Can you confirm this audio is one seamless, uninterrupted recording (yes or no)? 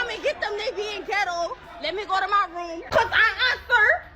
no